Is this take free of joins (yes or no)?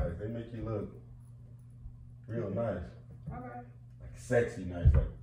yes